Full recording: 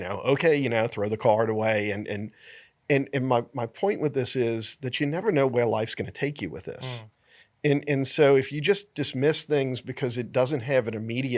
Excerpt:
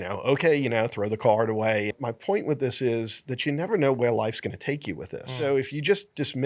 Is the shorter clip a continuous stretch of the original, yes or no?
no